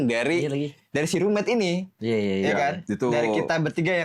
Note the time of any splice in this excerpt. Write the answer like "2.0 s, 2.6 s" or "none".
none